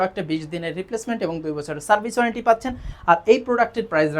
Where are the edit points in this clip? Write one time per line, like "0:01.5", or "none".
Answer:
none